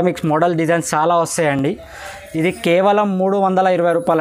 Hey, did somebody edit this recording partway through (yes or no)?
no